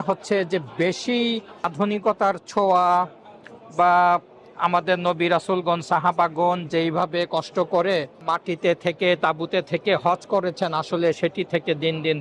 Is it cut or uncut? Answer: cut